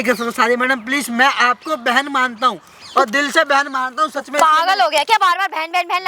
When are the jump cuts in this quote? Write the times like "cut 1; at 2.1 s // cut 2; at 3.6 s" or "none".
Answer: none